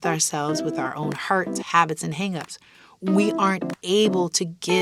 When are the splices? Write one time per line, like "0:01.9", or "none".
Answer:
none